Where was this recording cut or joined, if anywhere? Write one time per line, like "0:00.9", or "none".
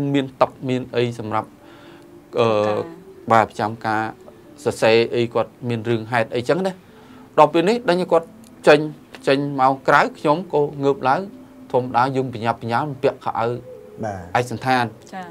none